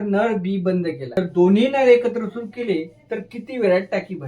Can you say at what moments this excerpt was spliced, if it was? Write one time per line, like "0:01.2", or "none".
0:01.2